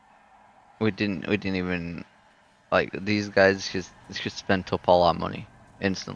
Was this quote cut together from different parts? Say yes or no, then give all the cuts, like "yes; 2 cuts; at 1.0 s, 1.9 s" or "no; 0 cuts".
no; 0 cuts